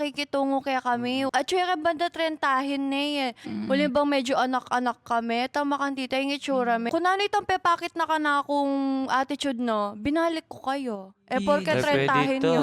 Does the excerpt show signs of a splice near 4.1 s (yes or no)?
no